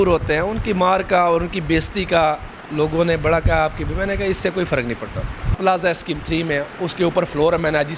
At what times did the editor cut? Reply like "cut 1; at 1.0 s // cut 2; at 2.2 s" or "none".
cut 1; at 5.6 s